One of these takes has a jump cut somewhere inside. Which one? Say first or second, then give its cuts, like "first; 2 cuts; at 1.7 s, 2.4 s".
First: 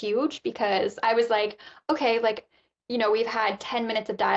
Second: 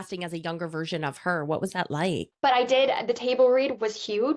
second; 1 cut; at 2.3 s